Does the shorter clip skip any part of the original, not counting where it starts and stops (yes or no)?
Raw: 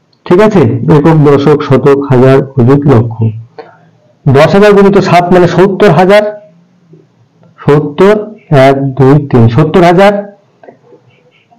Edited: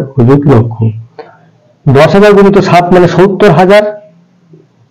no